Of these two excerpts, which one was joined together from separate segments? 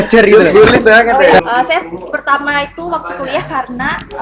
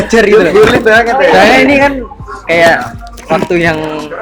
first; 1 cut; at 1.4 s

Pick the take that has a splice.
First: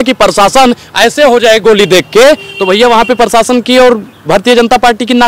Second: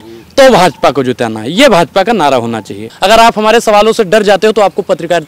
second; 1 cut; at 2.9 s

